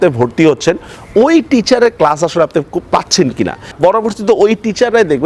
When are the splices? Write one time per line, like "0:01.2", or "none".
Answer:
0:03.7

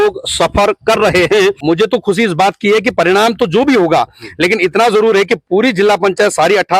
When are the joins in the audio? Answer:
0:01.6

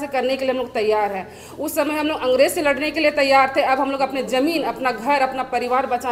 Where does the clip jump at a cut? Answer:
none

